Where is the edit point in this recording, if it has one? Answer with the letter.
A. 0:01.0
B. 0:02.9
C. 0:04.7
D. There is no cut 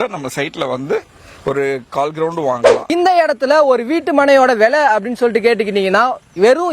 B